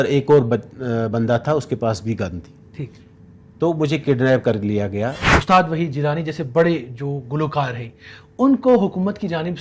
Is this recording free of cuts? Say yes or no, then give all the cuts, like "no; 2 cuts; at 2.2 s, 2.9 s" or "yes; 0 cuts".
no; 1 cut; at 5.3 s